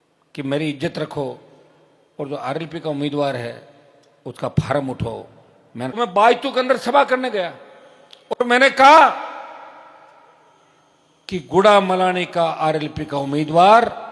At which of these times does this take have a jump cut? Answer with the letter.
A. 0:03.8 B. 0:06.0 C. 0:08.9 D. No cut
B